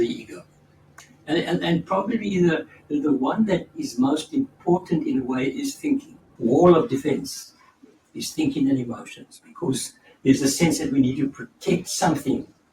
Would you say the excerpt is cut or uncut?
cut